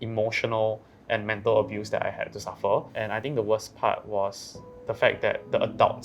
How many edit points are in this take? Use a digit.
1